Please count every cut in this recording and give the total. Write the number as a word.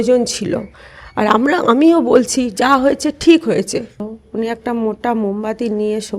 one